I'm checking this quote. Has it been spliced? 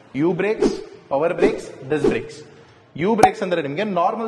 no; 0 cuts

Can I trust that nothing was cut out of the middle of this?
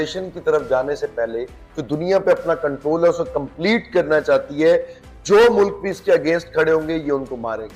yes; 0 cuts

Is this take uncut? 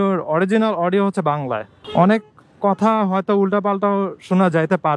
no; 1 cut; at 1.8 s

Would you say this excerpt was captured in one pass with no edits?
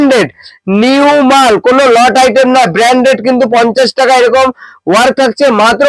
yes; 0 cuts

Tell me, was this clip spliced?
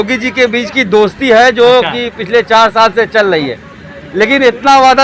no; 0 cuts

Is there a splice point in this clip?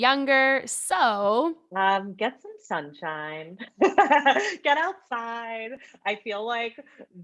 yes; 1 cut; at 1.6 s

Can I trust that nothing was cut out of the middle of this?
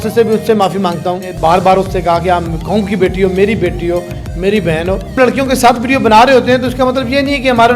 no; 2 cuts; at 1.3 s, 5.1 s

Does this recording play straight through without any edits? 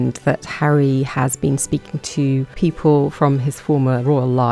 no; 1 cut; at 2.5 s

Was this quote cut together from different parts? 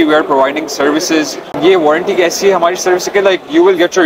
yes; 1 cut; at 1.4 s

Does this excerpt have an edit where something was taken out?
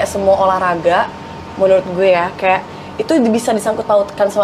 no; 0 cuts

